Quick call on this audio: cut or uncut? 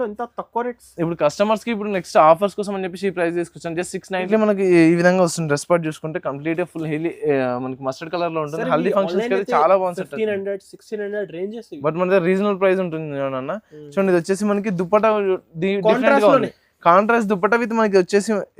cut